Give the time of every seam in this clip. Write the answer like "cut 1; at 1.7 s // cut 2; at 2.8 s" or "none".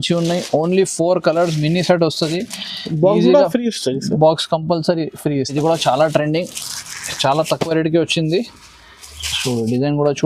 cut 1; at 5.5 s